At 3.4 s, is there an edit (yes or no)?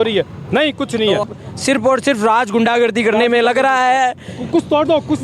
no